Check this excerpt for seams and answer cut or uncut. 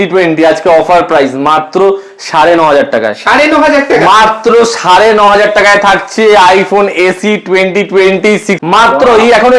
cut